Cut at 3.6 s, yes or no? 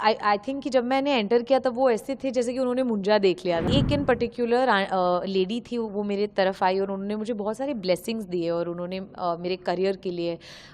yes